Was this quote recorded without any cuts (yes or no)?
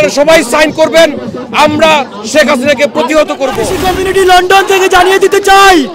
no